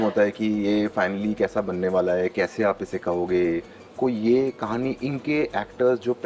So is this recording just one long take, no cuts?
no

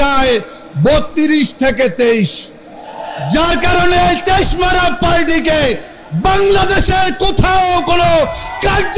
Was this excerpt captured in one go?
yes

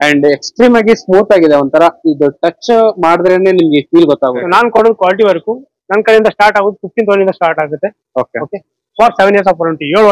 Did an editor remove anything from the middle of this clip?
yes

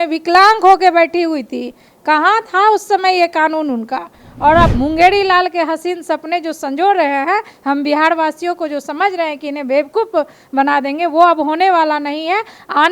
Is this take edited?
yes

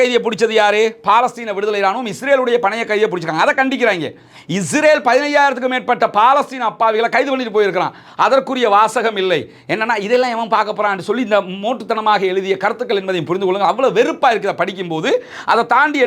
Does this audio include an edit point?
no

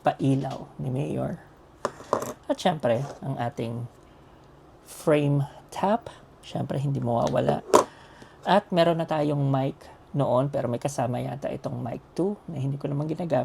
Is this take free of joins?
yes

